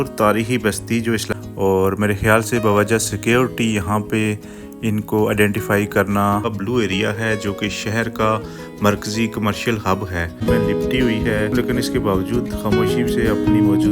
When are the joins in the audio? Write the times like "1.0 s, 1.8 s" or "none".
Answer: 1.3 s, 6.5 s, 10.4 s